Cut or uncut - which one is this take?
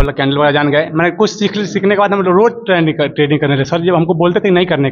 uncut